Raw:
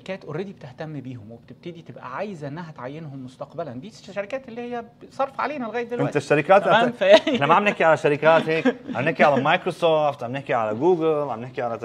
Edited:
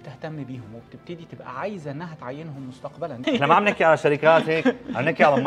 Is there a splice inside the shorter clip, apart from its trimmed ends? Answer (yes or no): yes